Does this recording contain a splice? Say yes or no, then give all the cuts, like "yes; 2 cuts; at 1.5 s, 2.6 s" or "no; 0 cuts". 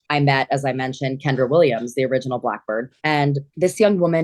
yes; 1 cut; at 2.9 s